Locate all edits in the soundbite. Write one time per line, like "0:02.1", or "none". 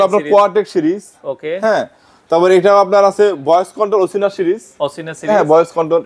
none